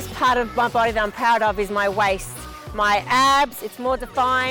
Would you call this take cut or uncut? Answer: uncut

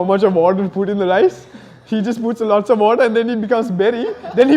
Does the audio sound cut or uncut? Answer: uncut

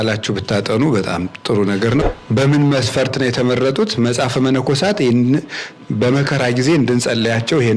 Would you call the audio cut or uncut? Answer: cut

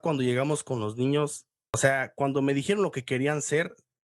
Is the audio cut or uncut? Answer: cut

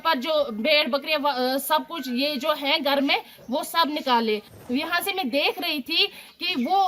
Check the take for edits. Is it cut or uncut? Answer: cut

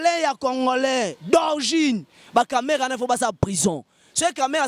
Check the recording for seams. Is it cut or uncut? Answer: uncut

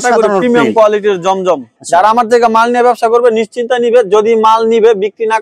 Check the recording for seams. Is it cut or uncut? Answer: cut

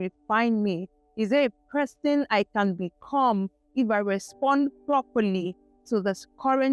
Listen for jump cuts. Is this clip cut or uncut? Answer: uncut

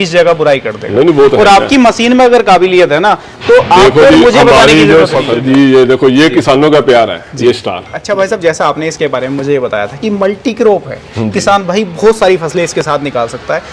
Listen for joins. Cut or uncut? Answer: cut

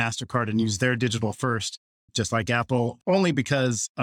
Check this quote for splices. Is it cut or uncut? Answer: uncut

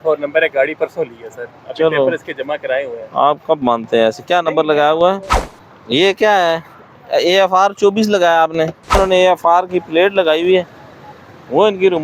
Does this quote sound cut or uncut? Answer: cut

